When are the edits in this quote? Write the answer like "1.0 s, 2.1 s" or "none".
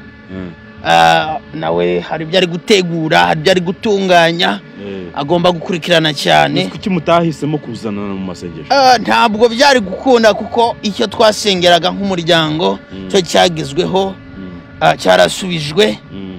none